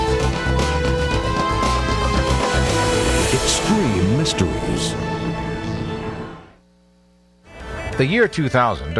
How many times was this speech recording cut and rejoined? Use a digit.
1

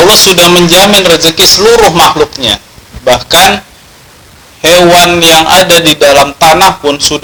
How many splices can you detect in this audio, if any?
0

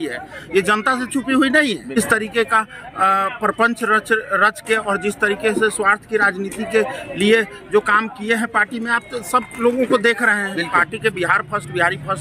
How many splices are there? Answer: 2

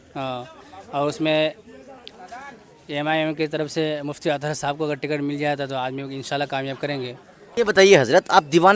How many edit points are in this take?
1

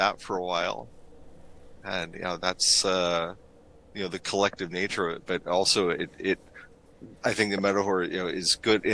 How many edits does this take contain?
0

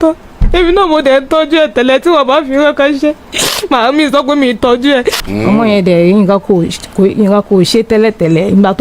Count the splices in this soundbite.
1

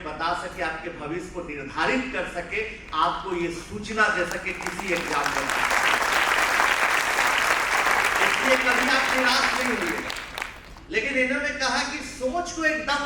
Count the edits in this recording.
0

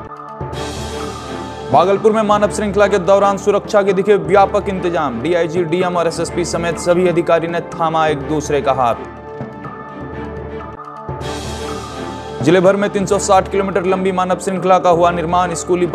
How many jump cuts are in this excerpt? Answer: 1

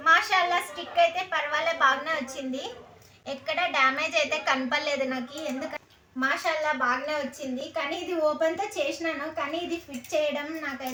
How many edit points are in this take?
0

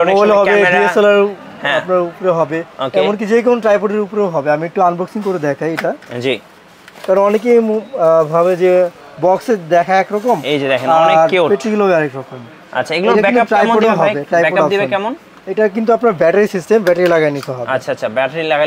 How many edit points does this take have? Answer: 0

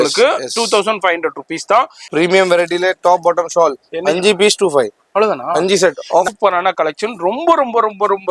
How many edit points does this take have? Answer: 2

